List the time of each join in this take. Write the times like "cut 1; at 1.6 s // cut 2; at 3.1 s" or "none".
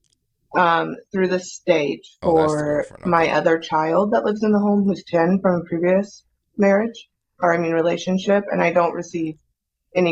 none